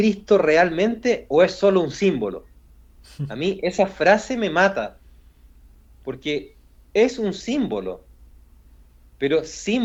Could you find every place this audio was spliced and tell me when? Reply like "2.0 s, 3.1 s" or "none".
none